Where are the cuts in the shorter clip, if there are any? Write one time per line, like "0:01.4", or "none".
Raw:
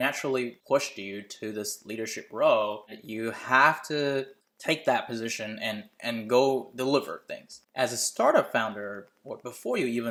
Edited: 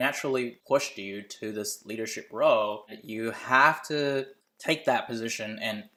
none